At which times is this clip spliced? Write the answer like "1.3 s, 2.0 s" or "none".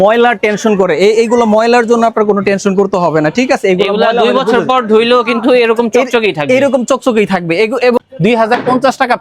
8.0 s